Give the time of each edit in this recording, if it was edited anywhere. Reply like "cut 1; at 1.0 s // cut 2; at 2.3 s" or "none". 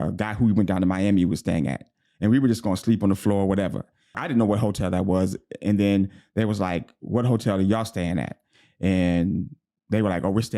cut 1; at 4.2 s